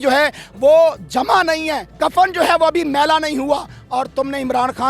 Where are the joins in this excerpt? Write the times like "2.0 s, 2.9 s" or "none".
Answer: 1.8 s